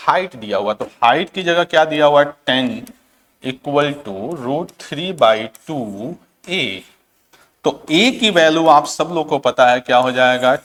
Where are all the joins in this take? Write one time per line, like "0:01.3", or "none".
none